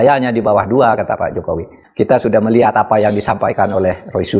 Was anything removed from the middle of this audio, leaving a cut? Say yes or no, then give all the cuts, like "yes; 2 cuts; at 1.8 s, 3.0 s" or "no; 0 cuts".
yes; 1 cut; at 1.8 s